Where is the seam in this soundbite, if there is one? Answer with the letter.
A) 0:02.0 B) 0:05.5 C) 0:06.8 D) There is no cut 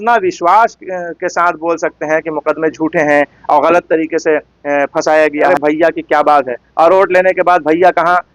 B